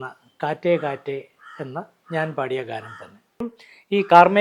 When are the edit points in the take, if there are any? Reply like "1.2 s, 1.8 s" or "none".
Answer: 3.5 s